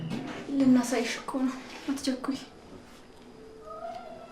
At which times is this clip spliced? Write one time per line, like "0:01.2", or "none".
none